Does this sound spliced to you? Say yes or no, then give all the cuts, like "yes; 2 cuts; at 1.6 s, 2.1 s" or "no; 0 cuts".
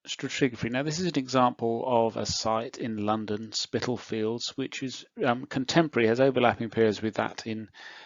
no; 0 cuts